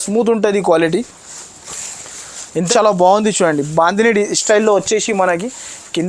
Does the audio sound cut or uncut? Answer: cut